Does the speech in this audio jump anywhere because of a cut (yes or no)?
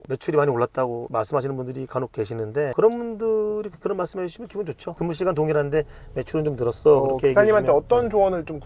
no